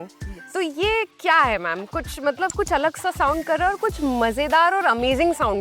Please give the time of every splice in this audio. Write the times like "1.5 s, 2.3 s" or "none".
none